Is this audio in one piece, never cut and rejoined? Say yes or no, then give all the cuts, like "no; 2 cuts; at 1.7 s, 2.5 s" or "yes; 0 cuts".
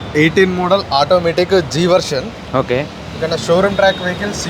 yes; 0 cuts